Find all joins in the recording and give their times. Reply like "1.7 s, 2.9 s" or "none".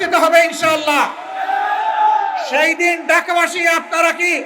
none